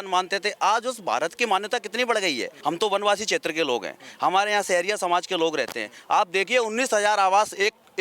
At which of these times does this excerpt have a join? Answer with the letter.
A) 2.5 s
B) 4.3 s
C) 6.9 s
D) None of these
A